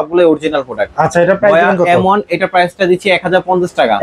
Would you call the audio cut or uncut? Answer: uncut